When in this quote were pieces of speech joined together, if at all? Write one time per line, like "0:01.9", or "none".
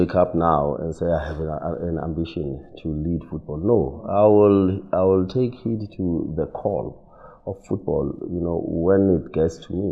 none